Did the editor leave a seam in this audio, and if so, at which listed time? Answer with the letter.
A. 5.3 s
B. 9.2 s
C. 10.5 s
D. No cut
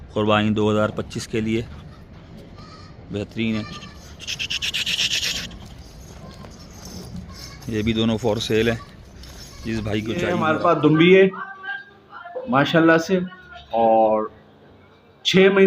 C